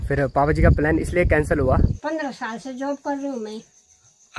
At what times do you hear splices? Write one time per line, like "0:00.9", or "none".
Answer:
0:02.0